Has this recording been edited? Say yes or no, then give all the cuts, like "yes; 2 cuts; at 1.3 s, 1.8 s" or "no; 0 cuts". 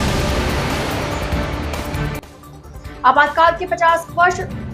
no; 0 cuts